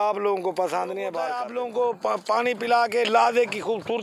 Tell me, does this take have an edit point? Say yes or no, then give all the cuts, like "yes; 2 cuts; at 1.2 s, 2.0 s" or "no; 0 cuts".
yes; 1 cut; at 1.4 s